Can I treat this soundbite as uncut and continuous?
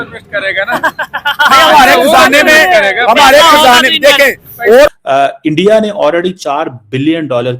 no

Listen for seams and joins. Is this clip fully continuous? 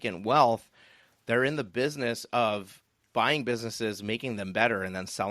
yes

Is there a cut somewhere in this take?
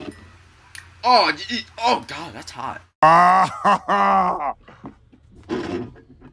yes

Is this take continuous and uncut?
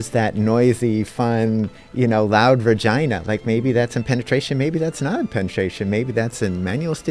yes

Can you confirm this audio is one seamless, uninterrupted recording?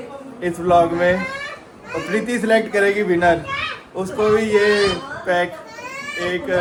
yes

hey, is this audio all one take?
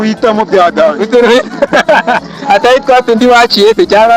yes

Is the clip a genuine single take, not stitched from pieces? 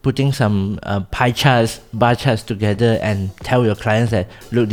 yes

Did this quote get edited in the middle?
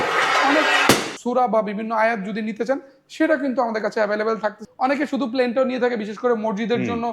yes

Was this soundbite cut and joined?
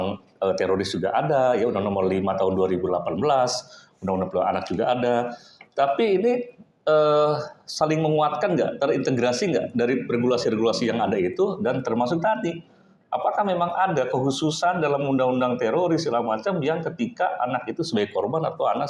no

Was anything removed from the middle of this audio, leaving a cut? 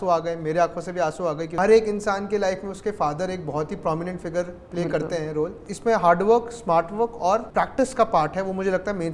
yes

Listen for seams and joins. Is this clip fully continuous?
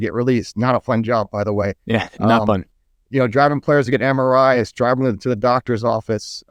yes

